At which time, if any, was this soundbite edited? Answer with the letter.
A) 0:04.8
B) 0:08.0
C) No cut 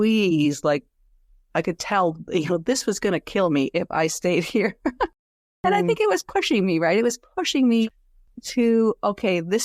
B